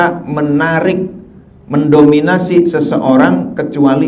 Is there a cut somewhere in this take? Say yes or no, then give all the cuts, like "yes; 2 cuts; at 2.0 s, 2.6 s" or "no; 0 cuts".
no; 0 cuts